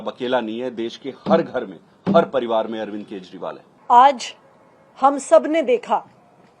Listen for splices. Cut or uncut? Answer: uncut